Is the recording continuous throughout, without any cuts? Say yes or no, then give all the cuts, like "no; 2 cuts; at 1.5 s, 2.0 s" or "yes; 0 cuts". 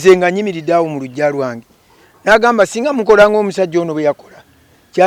yes; 0 cuts